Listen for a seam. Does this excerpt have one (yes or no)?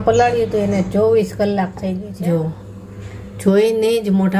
yes